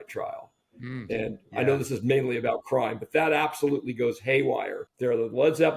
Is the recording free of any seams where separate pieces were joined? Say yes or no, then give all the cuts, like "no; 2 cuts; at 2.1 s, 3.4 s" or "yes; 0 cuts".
no; 1 cut; at 4.8 s